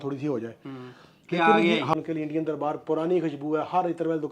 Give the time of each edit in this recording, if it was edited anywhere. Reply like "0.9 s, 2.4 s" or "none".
1.9 s